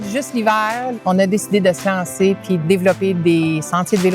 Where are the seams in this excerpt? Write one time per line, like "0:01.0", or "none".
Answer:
0:00.9
0:02.6